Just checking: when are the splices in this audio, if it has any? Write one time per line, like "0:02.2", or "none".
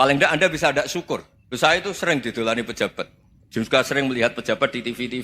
0:01.4